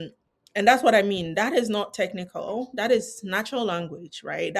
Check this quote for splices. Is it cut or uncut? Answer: uncut